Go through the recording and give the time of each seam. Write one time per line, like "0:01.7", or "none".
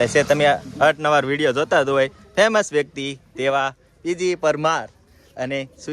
none